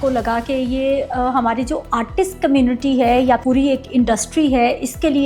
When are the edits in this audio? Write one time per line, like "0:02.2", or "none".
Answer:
0:03.4